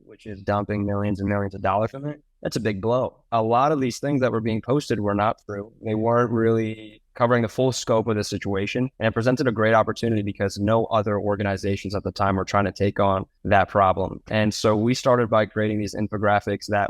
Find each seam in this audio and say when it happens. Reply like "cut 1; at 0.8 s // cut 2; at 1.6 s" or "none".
cut 1; at 3.2 s